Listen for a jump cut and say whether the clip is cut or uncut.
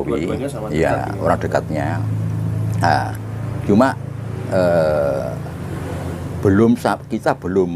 uncut